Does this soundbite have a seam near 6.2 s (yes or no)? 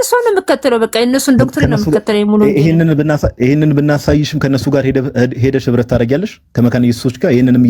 no